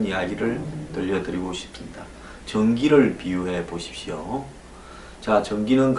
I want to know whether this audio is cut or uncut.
cut